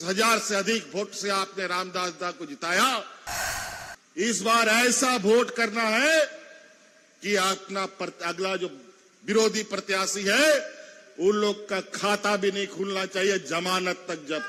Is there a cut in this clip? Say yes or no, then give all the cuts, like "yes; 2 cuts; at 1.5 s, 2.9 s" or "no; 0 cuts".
no; 0 cuts